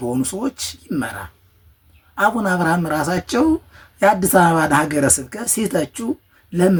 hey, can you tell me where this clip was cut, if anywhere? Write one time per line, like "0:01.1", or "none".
none